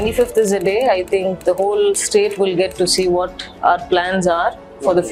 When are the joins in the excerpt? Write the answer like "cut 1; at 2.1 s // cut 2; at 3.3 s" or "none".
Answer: none

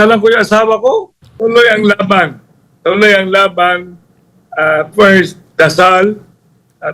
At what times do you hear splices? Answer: cut 1; at 1.2 s // cut 2; at 5.4 s

